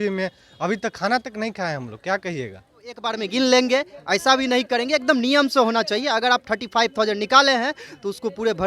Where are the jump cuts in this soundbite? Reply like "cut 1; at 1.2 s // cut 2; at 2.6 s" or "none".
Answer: cut 1; at 3.2 s